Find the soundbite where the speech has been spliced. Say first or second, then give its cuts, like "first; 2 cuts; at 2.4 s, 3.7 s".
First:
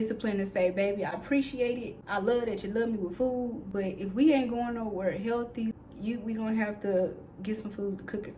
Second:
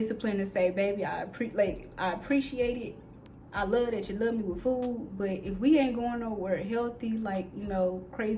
first; 3 cuts; at 1.1 s, 1.9 s, 5.7 s